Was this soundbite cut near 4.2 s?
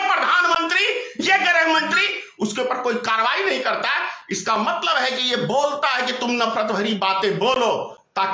no; 0 cuts

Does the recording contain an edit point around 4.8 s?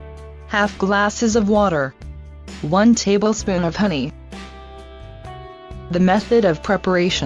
no; 1 cut; at 6.3 s

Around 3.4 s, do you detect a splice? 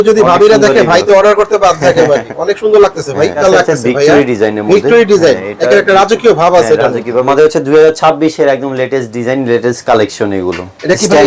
yes; 2 cuts; at 3.4 s, 7.3 s

